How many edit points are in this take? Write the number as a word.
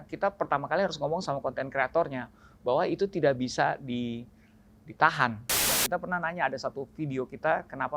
one